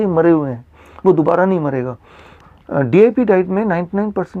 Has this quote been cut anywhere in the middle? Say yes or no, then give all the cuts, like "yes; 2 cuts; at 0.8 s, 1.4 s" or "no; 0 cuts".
yes; 1 cut; at 2.4 s